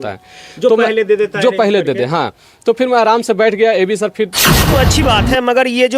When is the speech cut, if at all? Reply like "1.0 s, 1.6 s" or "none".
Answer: 4.6 s